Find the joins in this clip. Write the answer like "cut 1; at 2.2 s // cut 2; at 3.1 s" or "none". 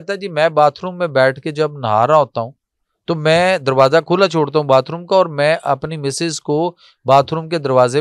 none